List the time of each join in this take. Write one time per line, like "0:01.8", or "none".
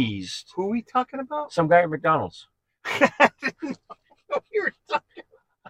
none